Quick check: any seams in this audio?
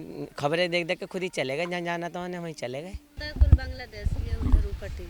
yes; 1 cut; at 3.2 s

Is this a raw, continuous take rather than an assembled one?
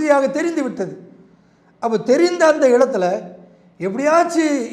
yes; 0 cuts

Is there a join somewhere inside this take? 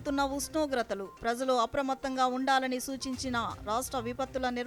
no; 0 cuts

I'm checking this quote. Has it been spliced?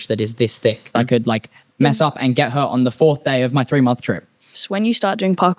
yes; 2 cuts; at 0.9 s, 4.6 s

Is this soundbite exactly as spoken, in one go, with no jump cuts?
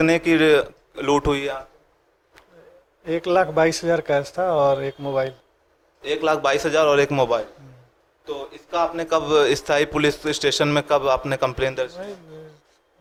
yes; 0 cuts

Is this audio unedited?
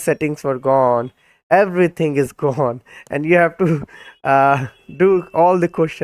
yes; 0 cuts

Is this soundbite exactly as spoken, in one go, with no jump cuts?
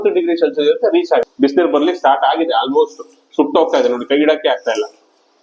no; 1 cut; at 1.3 s

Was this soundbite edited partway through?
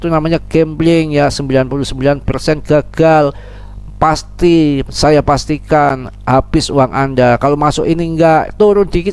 no; 0 cuts

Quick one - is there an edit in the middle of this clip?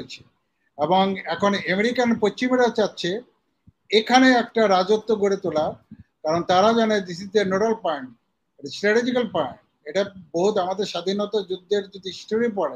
no; 0 cuts

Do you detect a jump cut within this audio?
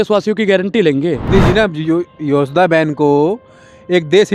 yes; 1 cut; at 1.2 s

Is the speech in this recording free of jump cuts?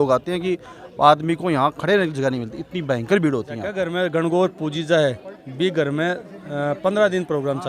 no; 1 cut; at 3.8 s

